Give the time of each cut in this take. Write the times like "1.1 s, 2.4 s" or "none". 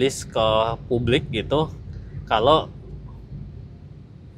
none